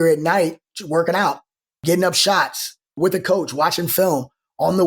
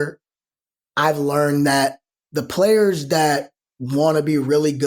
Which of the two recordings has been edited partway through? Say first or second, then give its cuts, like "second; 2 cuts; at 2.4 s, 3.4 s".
first; 2 cuts; at 1.8 s, 3.0 s